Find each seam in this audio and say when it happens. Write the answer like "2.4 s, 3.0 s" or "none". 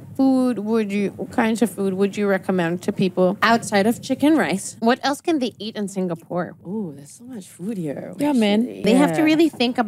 3.4 s, 4.7 s, 6.6 s, 8.8 s